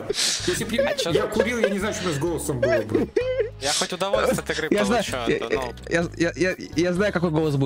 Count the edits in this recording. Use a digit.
0